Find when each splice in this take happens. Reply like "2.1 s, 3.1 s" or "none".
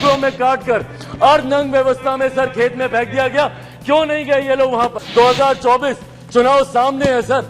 5.0 s